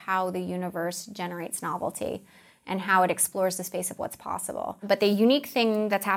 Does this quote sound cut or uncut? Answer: cut